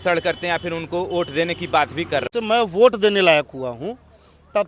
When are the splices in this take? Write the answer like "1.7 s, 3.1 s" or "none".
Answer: 2.3 s